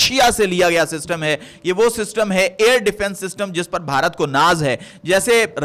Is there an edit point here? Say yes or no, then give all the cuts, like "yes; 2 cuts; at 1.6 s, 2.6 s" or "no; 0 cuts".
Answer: no; 0 cuts